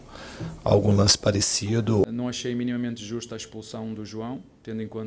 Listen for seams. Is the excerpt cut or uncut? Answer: cut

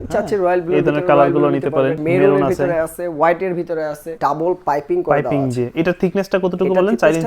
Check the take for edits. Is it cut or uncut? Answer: cut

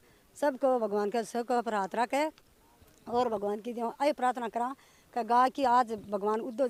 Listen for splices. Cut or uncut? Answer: uncut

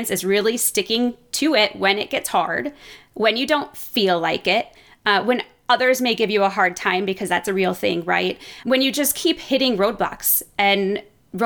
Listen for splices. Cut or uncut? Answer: uncut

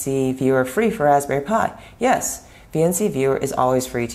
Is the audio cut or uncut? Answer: uncut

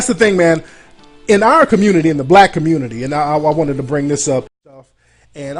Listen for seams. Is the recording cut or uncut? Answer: uncut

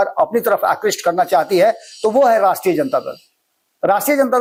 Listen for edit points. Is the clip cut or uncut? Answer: uncut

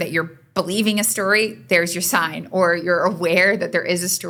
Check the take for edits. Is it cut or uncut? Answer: uncut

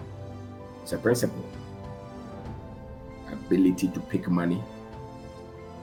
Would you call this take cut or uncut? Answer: uncut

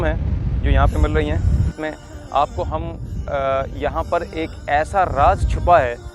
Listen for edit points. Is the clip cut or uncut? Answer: cut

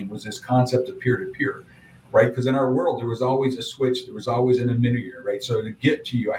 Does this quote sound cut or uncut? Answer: uncut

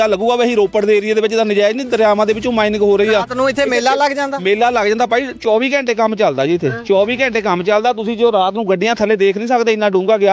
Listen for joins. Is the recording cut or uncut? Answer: uncut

